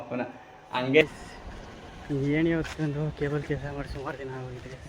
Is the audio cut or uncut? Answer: cut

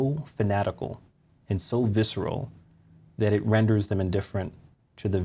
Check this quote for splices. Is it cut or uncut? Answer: uncut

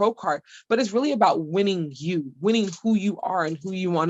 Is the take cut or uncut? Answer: uncut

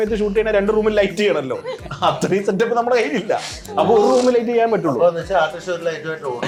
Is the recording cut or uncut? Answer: uncut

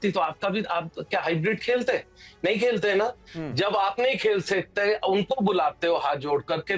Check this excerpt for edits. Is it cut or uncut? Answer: uncut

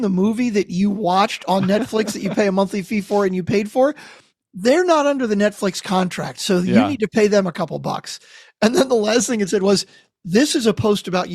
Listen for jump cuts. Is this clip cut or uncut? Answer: uncut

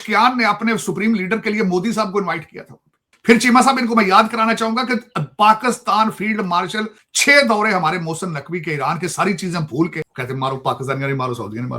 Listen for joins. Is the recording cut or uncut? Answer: cut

